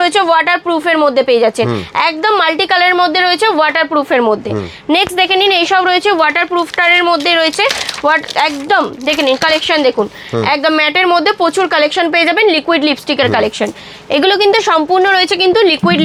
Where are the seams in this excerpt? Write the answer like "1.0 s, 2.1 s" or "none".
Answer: none